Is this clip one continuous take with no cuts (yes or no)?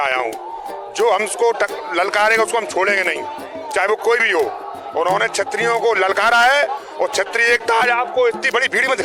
yes